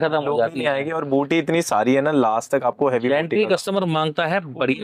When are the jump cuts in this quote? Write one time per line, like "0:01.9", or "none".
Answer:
none